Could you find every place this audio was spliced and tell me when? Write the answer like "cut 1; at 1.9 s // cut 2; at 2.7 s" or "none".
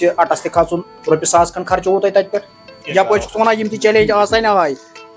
cut 1; at 2.8 s